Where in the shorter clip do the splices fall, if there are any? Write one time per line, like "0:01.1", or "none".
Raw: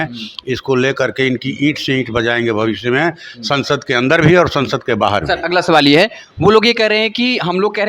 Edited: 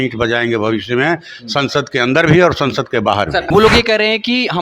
0:03.4